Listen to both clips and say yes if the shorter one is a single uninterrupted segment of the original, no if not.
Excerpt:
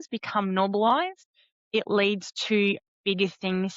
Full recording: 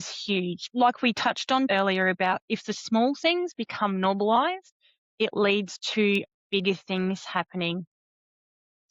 yes